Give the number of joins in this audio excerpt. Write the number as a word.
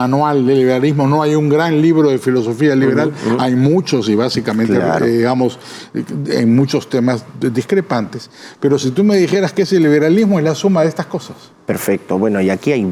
zero